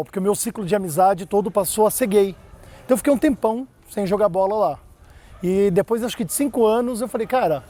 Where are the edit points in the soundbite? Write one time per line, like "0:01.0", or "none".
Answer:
none

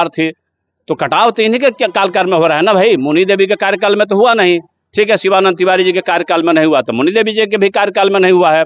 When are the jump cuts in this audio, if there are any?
none

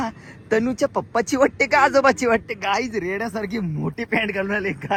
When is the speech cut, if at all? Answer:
none

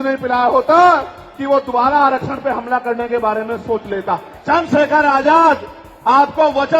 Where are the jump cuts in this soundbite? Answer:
0:04.3

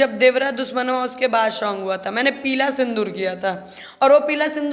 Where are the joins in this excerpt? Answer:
none

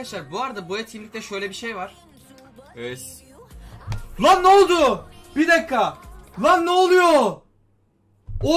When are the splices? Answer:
none

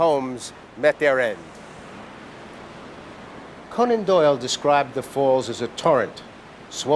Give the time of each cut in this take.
none

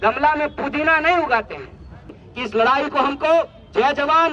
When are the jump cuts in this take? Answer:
0:02.2

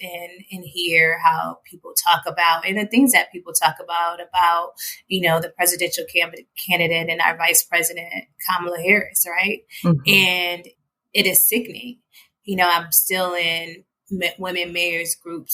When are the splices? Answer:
none

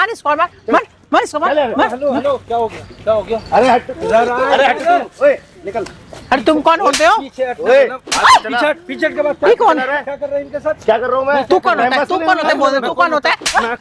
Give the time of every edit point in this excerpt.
none

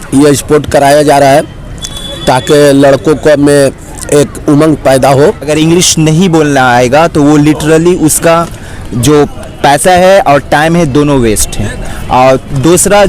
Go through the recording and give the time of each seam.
0:05.5

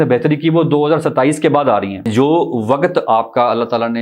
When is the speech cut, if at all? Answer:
0:02.1

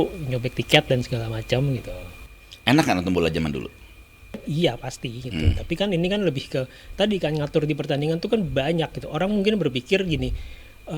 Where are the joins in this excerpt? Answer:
none

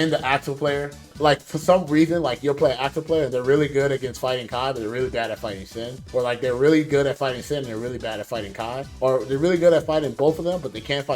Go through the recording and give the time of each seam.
0:01.0

